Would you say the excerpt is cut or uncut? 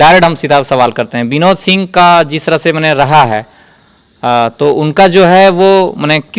uncut